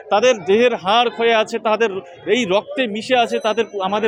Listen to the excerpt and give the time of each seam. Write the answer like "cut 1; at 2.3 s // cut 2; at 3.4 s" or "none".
none